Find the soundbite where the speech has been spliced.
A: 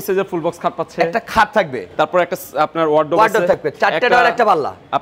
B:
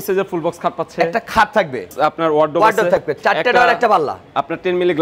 B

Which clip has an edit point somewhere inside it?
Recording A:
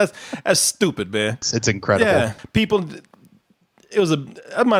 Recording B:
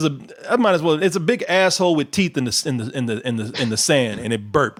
A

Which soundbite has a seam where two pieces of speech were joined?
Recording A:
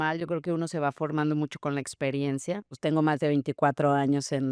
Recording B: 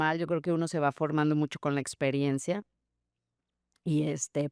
A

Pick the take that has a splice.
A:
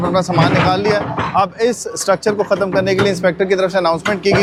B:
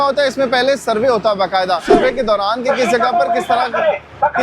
B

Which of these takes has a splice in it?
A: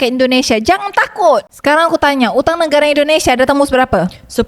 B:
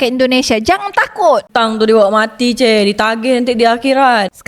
A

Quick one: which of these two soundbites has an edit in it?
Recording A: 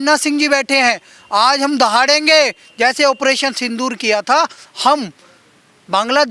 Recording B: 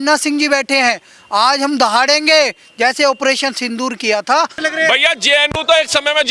B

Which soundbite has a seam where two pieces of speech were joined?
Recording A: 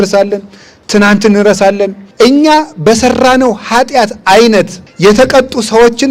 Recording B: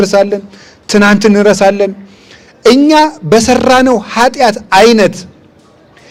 A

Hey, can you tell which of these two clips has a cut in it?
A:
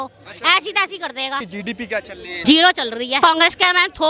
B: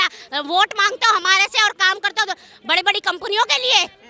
A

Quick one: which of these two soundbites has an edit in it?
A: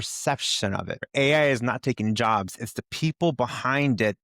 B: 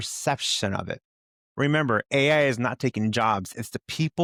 A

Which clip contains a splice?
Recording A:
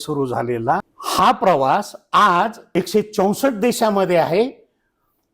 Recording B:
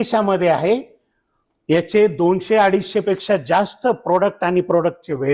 A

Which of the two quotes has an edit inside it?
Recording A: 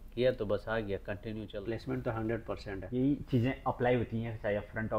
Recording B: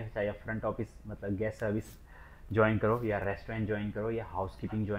A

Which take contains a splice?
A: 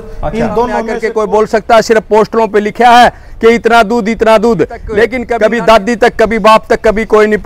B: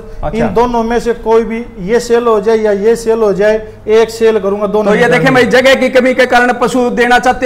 A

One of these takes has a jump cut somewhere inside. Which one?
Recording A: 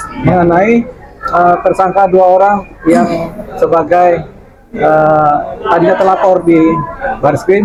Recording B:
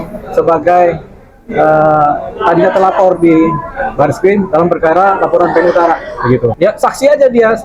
B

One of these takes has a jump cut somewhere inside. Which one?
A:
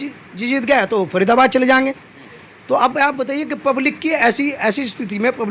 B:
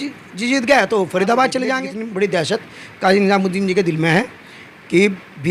B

